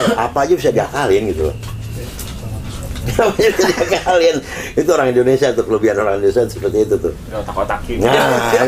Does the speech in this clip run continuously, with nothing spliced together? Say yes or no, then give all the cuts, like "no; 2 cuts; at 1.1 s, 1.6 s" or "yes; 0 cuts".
yes; 0 cuts